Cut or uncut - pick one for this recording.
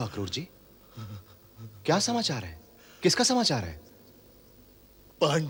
uncut